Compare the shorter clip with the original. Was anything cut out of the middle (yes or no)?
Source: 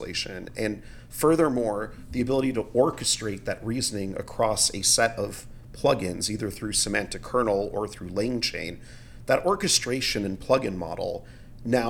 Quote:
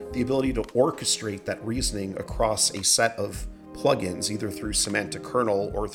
no